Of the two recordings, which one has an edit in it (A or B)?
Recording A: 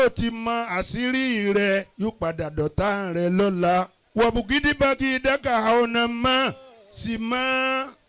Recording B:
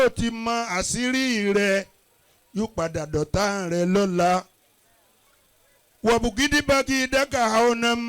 A